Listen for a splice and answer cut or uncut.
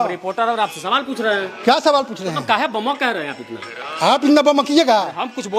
uncut